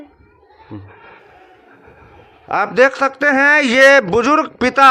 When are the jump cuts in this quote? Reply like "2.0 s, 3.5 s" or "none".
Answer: none

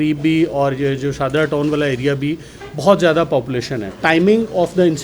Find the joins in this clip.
4.0 s

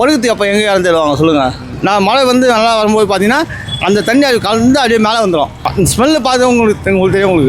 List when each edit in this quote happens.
1.7 s, 5.6 s

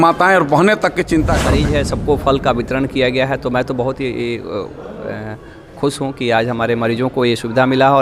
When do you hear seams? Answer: 1.6 s

